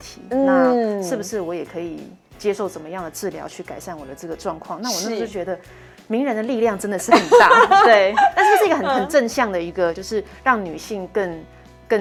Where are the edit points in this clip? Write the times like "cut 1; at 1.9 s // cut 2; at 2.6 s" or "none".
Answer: none